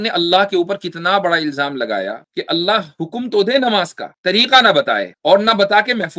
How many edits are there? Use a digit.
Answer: 3